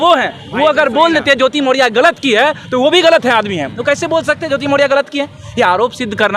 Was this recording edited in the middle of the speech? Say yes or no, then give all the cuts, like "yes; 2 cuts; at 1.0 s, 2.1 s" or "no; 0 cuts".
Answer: no; 0 cuts